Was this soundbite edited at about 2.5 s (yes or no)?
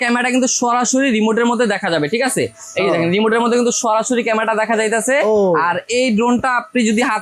no